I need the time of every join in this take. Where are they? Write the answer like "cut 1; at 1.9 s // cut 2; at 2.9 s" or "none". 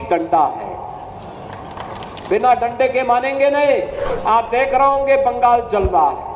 cut 1; at 4.0 s